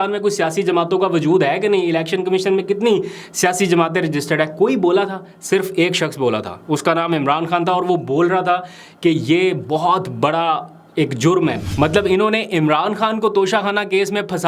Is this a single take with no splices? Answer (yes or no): no